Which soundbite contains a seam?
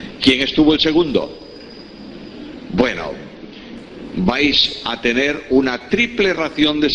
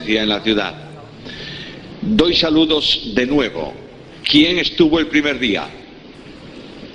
first; 1 cut; at 4.8 s

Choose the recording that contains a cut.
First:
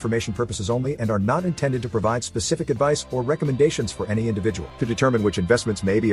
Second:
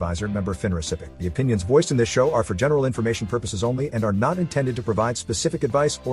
second; 1 cut; at 1.1 s

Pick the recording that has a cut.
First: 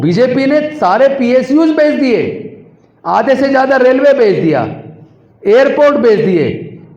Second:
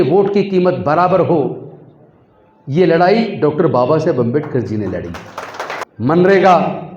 second; 1 cut; at 5.9 s

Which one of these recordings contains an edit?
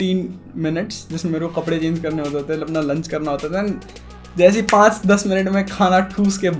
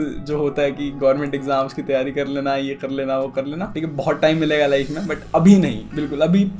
second; 1 cut; at 3.6 s

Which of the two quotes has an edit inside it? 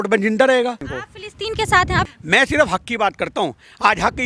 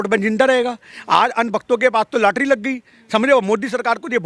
first; 2 cuts; at 0.9 s, 2.1 s

